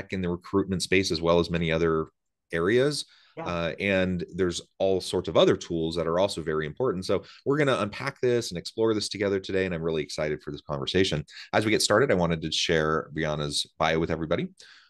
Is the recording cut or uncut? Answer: uncut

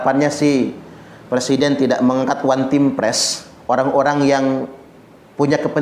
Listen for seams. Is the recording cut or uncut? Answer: uncut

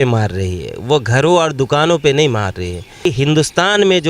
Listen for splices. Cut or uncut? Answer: cut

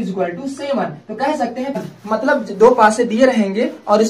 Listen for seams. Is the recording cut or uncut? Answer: cut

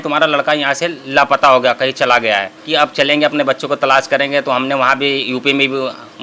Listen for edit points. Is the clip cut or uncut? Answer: cut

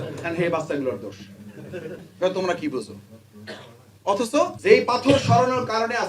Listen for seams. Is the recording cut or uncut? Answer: cut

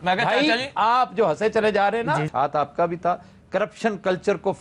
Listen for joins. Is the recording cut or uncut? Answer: cut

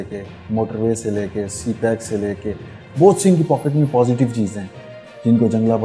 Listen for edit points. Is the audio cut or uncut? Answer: uncut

